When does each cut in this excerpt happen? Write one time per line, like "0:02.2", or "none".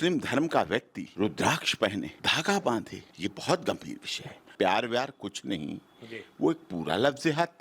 0:01.0
0:02.2
0:03.0
0:04.5